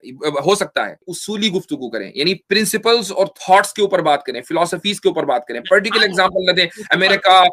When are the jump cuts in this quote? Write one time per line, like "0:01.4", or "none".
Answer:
0:01.1